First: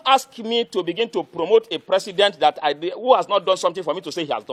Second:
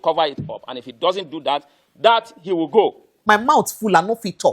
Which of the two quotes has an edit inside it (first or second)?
second